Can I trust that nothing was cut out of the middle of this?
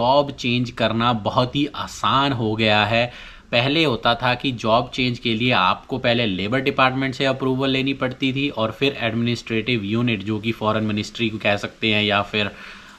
yes; 0 cuts

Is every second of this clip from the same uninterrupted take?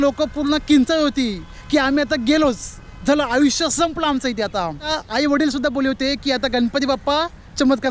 no; 1 cut; at 4.9 s

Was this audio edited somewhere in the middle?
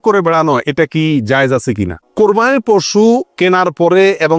yes; 1 cut; at 2.0 s

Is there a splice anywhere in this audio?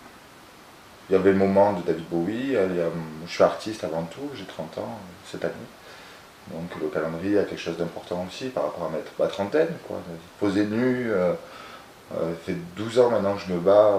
no; 0 cuts

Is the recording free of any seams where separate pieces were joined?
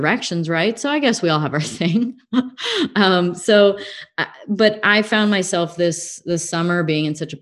yes; 0 cuts

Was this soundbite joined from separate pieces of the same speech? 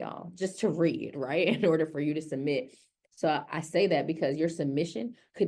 no; 0 cuts

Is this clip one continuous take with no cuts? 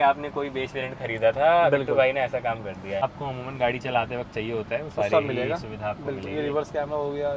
no; 1 cut; at 3.0 s

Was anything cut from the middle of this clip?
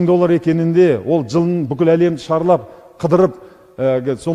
no; 0 cuts

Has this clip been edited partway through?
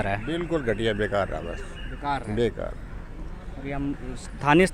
no; 0 cuts

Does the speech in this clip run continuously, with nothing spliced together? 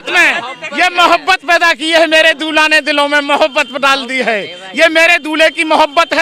yes; 0 cuts

